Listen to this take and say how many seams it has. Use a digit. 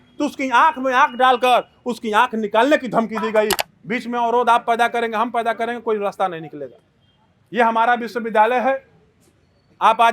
1